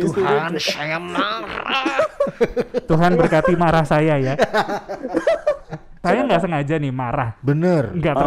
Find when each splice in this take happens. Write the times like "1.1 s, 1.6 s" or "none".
6.0 s